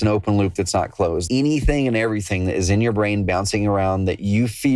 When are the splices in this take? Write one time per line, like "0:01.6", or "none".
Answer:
0:01.2